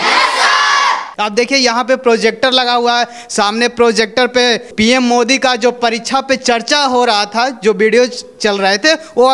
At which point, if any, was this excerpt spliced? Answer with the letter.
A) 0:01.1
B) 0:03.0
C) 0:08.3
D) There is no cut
A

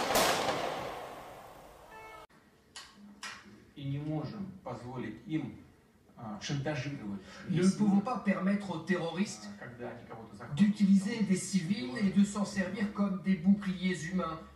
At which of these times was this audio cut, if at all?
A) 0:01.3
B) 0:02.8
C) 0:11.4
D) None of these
D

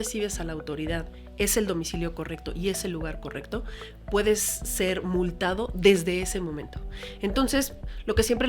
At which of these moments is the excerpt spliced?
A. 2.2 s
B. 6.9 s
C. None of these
C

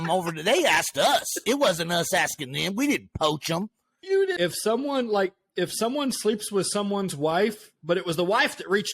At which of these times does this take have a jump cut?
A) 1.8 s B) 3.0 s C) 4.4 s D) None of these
C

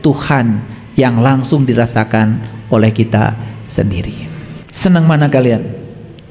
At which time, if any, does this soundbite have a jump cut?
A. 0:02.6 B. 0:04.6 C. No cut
B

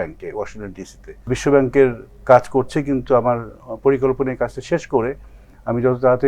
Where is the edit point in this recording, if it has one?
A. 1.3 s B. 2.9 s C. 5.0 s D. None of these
A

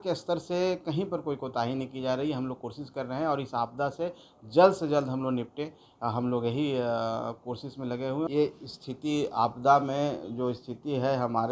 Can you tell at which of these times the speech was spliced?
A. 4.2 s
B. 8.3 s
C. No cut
B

